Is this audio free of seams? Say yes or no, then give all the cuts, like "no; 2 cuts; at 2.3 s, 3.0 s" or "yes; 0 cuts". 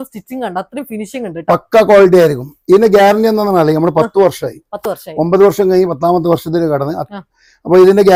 yes; 0 cuts